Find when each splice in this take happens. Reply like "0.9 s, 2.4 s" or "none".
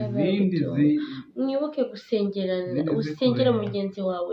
none